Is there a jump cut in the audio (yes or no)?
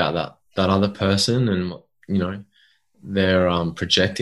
no